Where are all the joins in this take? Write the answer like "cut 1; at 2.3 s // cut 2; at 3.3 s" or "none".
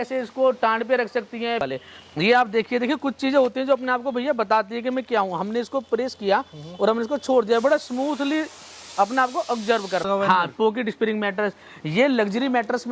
cut 1; at 1.6 s // cut 2; at 10.1 s